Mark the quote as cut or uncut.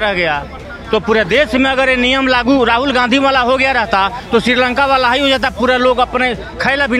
uncut